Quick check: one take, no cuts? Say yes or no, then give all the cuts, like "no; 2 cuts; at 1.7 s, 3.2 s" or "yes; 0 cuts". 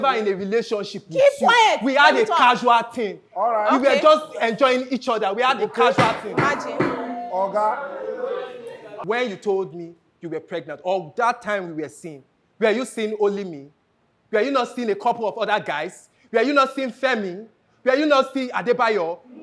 no; 1 cut; at 8.9 s